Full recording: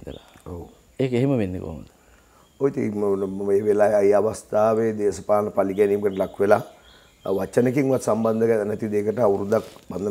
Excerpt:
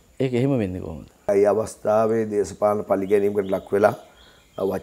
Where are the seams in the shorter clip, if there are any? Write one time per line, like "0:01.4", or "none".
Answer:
0:01.3